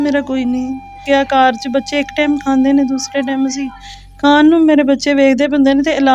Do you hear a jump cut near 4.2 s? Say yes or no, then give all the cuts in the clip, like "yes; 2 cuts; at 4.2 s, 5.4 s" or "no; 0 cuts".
no; 1 cut; at 1.0 s